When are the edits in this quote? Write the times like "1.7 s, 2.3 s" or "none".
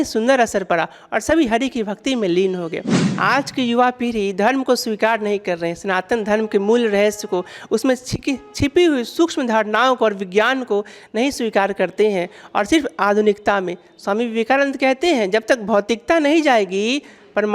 3.0 s